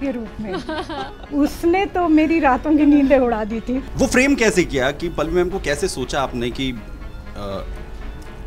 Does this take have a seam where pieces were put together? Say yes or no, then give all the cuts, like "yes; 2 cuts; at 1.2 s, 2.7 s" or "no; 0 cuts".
yes; 1 cut; at 3.8 s